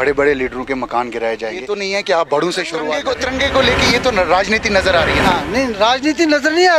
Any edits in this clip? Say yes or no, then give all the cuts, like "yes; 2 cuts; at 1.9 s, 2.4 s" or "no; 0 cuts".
yes; 2 cuts; at 1.6 s, 3.0 s